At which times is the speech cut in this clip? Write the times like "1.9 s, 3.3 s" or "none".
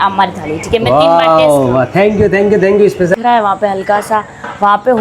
3.1 s

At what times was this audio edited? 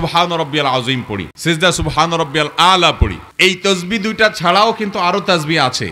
none

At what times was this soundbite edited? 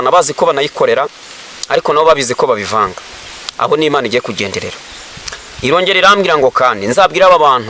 none

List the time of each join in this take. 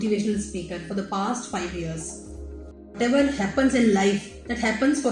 3.0 s

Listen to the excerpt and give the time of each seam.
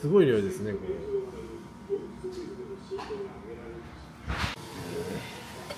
none

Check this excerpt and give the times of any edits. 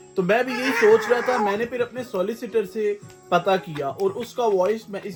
none

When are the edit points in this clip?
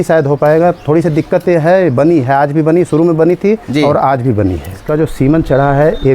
4.7 s

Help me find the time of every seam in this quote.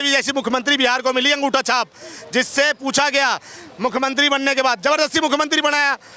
none

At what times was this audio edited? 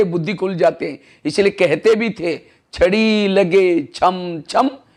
none

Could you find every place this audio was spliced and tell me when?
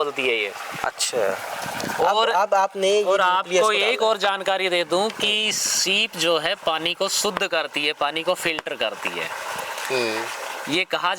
none

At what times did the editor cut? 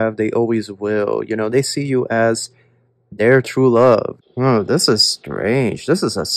4.1 s

